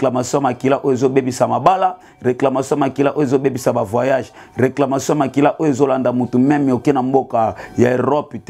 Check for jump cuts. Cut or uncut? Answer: uncut